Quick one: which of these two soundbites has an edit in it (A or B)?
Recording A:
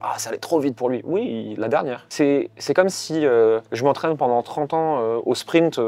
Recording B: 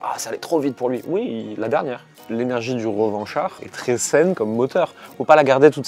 B